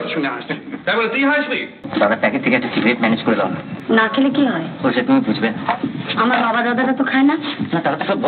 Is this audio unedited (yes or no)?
no